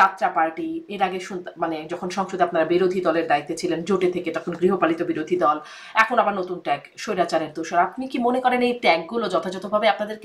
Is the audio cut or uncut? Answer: uncut